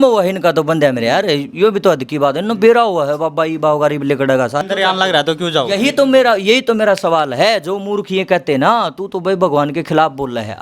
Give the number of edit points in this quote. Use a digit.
1